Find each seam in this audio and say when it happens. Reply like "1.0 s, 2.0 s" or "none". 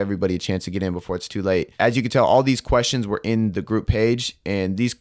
1.7 s